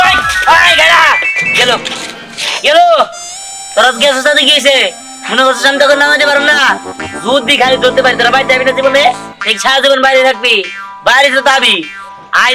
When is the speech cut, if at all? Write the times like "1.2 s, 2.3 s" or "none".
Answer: none